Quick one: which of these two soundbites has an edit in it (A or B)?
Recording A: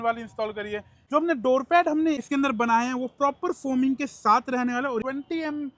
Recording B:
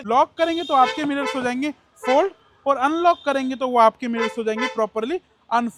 A